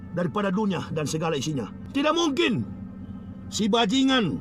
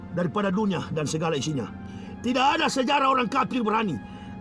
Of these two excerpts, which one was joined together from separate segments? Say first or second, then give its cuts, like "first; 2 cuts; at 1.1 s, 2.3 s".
first; 1 cut; at 1.8 s